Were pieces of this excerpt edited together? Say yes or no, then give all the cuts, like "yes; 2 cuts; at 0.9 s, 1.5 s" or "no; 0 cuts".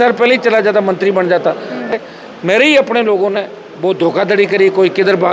yes; 1 cut; at 1.9 s